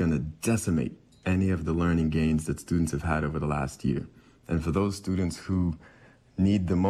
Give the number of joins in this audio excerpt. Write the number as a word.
zero